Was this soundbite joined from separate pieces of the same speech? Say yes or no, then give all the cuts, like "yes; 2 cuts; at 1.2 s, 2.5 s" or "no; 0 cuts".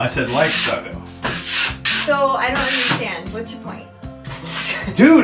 yes; 1 cut; at 1.9 s